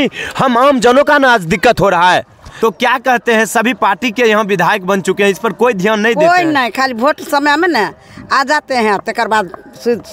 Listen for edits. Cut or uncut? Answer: cut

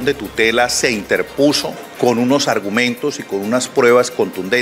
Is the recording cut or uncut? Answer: cut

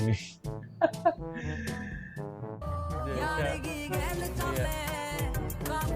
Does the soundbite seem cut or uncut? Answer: uncut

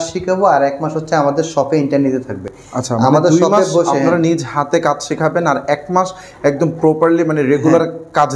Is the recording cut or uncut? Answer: uncut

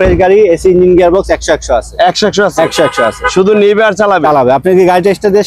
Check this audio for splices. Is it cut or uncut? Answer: uncut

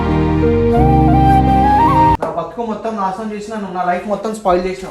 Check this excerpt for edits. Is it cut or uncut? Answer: cut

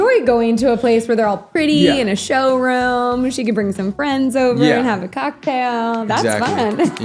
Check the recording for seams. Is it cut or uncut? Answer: uncut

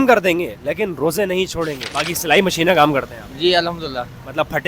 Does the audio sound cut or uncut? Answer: cut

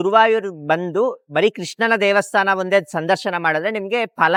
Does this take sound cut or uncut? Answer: uncut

